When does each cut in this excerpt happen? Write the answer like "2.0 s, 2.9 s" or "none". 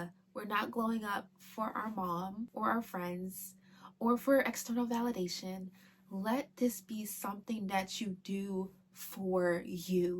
2.5 s